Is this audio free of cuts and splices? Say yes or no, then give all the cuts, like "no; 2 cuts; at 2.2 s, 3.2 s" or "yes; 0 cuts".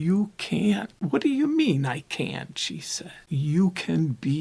no; 2 cuts; at 1.0 s, 3.3 s